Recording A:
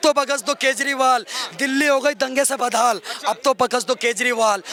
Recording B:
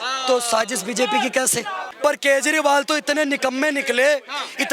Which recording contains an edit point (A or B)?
B